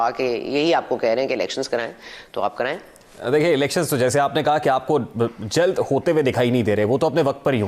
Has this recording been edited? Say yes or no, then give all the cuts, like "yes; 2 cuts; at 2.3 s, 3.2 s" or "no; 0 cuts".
no; 0 cuts